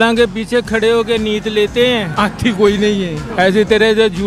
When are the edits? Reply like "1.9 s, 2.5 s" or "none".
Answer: 2.1 s, 3.2 s